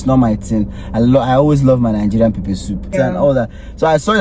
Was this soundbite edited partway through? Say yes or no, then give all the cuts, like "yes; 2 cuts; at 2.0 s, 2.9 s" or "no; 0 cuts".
yes; 1 cut; at 2.9 s